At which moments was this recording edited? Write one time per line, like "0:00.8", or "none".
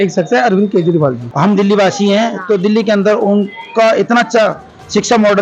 0:01.2

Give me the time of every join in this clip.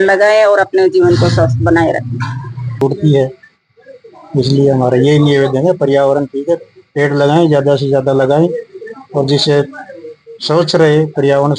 0:02.8

